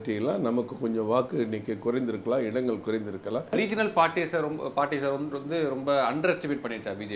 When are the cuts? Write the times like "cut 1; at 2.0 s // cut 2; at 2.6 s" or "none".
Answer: cut 1; at 3.5 s